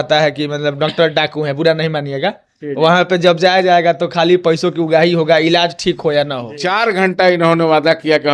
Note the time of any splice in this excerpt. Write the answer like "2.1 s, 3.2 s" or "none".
6.5 s